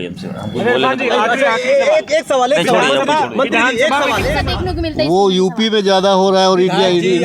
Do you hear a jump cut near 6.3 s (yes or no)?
no